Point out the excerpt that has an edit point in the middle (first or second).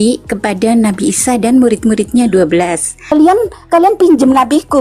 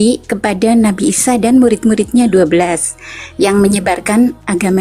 first